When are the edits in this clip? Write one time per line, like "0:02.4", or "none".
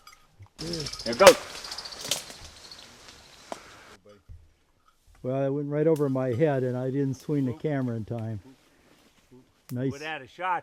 0:00.9
0:03.6

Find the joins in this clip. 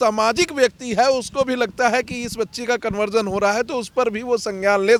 none

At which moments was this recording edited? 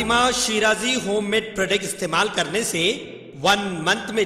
none

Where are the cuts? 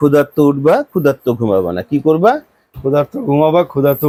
none

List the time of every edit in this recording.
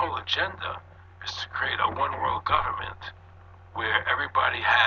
none

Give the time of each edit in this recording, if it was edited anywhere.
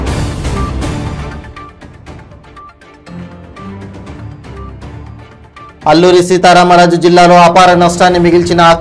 0:01.2

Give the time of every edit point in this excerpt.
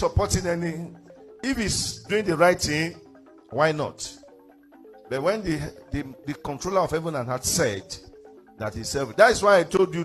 none

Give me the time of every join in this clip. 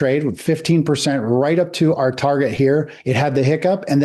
0:03.0

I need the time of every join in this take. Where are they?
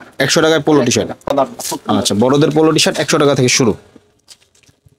none

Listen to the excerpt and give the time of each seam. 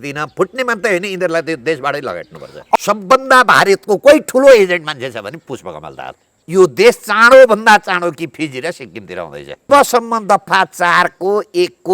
0:02.8
0:06.3
0:09.7

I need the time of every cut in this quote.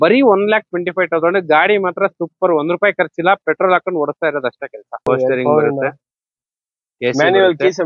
0:05.1

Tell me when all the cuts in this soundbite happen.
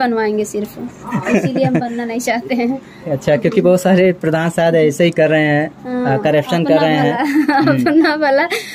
none

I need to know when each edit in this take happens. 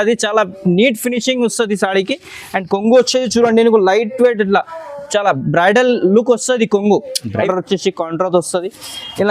0:07.4

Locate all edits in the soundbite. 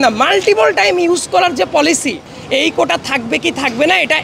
0:02.3

